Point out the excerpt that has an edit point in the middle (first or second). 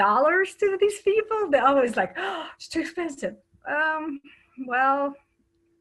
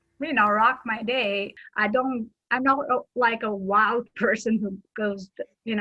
second